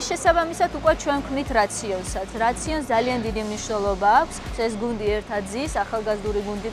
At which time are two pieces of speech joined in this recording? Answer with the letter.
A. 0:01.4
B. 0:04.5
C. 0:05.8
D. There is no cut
B